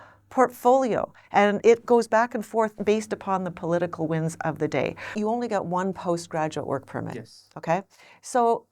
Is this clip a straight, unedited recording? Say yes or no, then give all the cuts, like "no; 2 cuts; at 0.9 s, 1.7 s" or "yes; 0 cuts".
no; 3 cuts; at 1.6 s, 2.8 s, 5.1 s